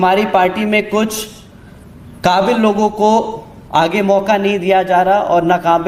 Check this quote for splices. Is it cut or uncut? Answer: uncut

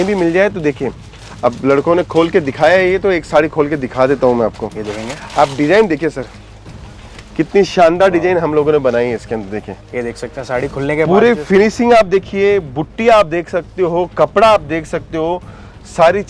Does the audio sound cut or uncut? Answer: uncut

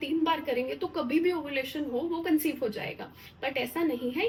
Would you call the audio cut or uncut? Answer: uncut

